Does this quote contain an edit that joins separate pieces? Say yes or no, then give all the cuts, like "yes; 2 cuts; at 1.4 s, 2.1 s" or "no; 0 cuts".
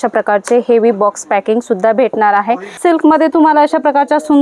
yes; 1 cut; at 2.7 s